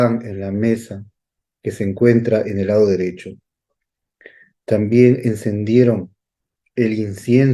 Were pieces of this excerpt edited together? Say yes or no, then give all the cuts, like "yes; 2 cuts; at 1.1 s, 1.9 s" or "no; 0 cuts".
no; 0 cuts